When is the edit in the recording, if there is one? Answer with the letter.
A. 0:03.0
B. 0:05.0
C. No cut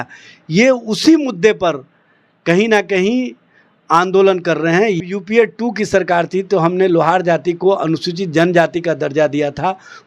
B